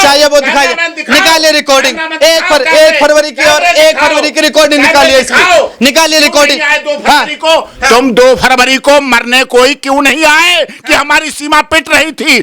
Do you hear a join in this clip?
no; 0 cuts

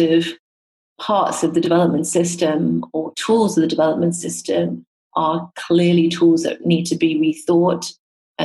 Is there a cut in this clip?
no; 0 cuts

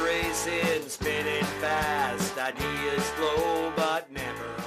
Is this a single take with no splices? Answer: yes; 0 cuts

